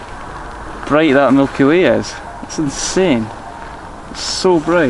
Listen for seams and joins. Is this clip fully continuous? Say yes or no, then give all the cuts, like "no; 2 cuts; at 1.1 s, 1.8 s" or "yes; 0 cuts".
yes; 0 cuts